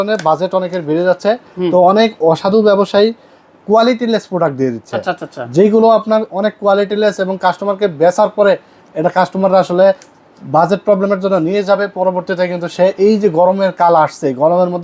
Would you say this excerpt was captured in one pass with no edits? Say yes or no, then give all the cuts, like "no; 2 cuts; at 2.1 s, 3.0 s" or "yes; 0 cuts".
yes; 0 cuts